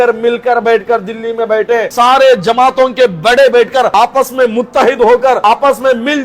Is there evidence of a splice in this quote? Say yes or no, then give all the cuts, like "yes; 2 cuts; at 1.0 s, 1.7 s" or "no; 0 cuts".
yes; 3 cuts; at 1.9 s, 3.9 s, 5.4 s